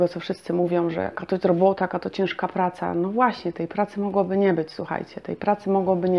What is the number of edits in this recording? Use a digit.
0